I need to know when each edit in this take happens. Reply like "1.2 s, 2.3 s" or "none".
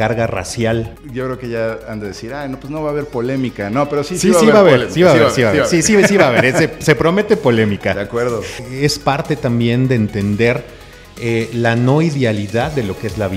1.0 s, 8.5 s

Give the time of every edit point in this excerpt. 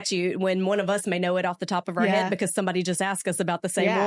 none

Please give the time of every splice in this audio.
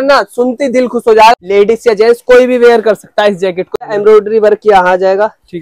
1.3 s, 3.8 s

